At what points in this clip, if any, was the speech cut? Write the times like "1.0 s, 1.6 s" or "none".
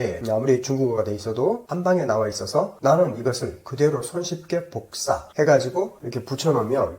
1.7 s, 6.0 s